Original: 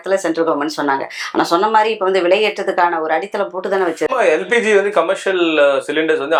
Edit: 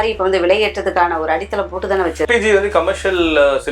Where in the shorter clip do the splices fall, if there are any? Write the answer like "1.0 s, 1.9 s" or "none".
2.3 s